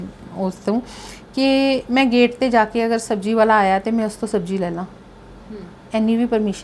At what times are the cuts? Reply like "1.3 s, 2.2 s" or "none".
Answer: none